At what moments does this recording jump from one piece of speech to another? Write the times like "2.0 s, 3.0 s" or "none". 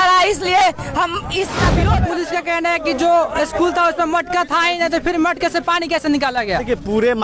1.9 s